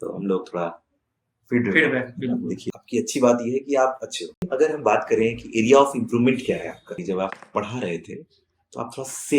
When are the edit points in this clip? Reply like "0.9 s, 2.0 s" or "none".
2.7 s, 4.5 s, 7.0 s